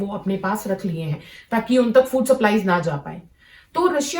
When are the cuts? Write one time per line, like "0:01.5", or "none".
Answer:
none